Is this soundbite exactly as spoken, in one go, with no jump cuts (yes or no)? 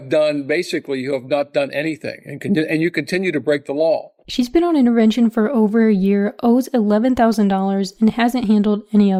yes